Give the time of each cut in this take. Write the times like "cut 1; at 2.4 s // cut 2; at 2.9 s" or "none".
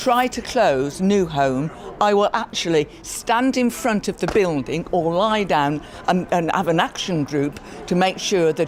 none